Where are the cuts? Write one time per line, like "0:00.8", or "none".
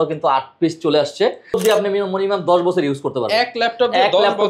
0:01.6